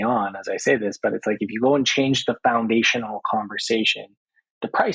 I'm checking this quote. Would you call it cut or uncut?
uncut